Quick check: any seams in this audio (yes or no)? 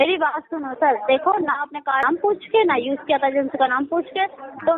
yes